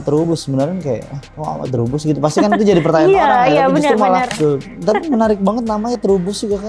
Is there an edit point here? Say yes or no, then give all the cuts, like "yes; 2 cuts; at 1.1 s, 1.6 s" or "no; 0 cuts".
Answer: yes; 1 cut; at 4.3 s